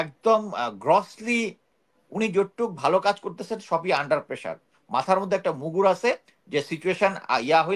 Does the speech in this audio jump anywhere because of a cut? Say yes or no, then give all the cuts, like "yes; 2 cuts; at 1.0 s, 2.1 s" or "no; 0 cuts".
no; 0 cuts